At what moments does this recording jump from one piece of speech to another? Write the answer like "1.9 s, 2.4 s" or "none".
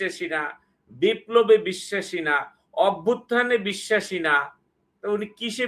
none